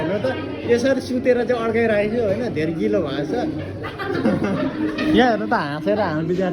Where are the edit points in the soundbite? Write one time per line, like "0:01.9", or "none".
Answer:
none